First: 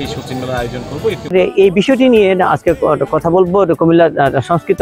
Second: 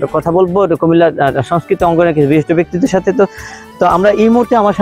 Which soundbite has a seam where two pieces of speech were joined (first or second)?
first